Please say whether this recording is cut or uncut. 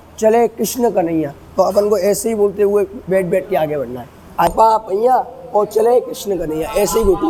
uncut